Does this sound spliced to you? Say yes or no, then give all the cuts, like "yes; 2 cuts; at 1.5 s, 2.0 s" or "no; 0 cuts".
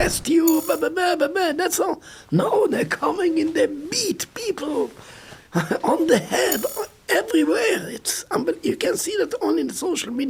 no; 0 cuts